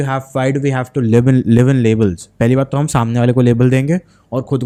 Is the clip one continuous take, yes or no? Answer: yes